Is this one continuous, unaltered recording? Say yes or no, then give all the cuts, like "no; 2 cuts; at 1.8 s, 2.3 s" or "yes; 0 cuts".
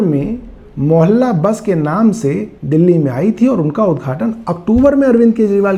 yes; 0 cuts